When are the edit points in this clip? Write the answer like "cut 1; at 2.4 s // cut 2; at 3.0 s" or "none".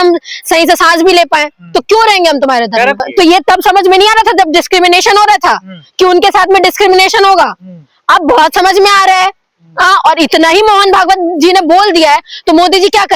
cut 1; at 3.0 s